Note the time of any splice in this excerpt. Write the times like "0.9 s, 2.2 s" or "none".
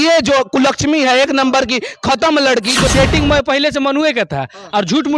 2.9 s